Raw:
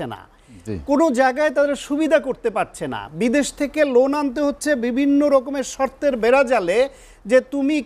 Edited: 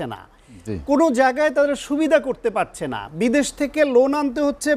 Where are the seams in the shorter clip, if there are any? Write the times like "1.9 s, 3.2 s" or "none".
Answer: none